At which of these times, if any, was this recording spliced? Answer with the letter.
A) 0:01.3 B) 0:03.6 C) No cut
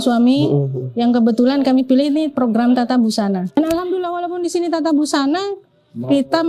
B